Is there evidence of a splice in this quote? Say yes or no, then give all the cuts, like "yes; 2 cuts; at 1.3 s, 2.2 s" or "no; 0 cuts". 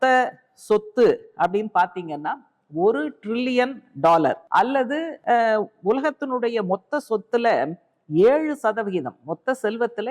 yes; 1 cut; at 4.9 s